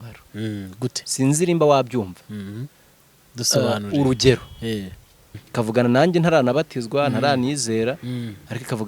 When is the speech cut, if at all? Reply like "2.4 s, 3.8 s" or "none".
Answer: 5.4 s